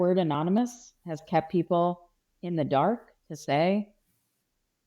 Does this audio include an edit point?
no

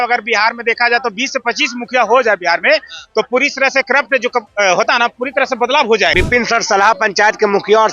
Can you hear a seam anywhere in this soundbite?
yes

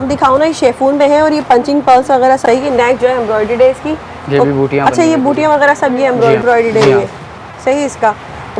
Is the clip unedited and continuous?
no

